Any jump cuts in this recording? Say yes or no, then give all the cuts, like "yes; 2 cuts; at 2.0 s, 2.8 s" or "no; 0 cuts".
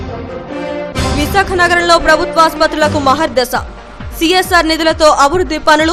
yes; 1 cut; at 0.9 s